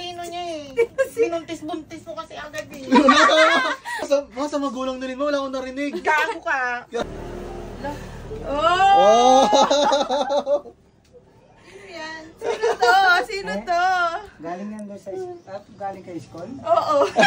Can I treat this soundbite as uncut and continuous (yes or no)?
no